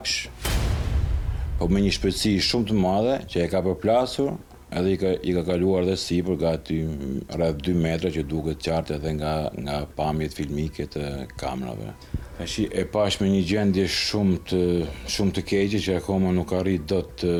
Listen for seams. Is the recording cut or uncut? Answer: uncut